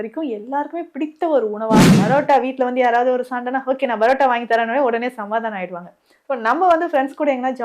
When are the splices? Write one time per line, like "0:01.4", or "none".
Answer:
0:01.9